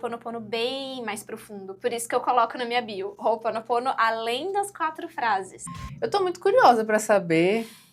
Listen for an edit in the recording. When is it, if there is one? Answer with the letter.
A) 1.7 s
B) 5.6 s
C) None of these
B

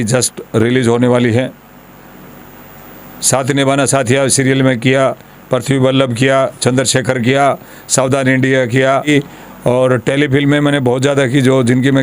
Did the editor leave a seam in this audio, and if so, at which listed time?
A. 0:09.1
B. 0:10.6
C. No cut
A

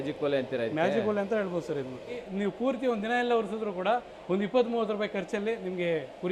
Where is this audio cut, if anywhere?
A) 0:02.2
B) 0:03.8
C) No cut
A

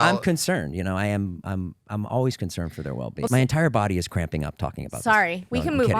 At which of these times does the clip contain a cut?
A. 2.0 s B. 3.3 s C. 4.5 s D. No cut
B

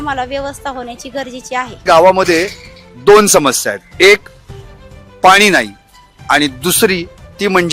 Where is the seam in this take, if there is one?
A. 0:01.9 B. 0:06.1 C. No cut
A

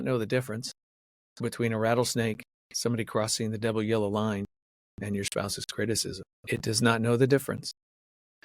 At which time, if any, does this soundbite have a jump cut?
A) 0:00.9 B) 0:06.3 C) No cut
B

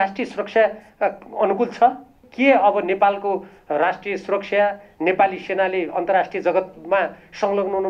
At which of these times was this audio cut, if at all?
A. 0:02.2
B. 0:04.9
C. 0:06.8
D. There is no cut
A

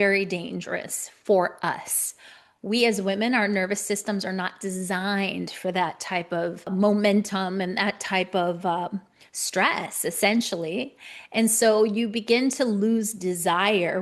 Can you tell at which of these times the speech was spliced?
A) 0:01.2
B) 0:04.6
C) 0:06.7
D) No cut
C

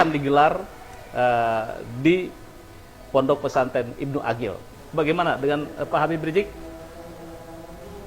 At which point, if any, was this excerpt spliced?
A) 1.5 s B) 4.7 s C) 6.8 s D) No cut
B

